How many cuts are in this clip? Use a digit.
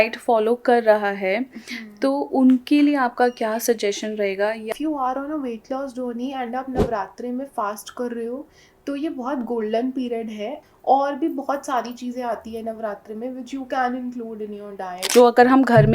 3